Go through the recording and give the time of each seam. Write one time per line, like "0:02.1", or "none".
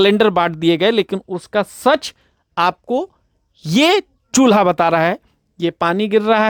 none